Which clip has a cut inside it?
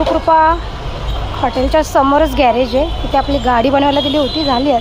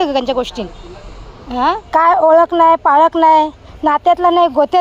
second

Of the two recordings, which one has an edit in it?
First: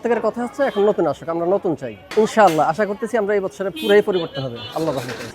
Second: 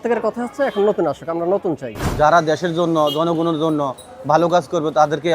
second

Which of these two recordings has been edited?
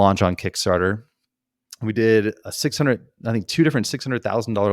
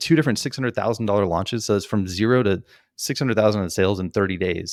first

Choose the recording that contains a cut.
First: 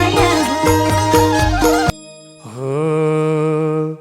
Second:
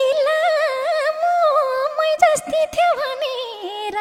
first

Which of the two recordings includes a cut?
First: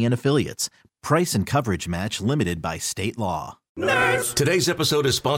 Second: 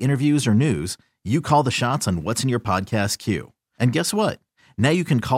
first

